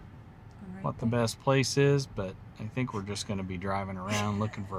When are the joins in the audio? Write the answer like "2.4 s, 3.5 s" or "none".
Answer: none